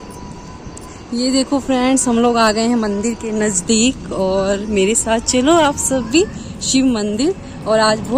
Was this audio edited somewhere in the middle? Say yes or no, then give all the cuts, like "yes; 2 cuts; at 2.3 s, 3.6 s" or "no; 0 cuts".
no; 0 cuts